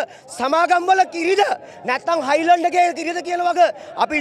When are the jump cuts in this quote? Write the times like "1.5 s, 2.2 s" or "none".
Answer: none